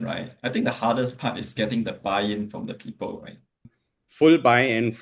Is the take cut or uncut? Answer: cut